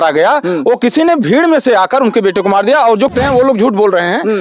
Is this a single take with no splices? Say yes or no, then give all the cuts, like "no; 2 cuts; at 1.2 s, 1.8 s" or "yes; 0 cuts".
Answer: no; 1 cut; at 3.1 s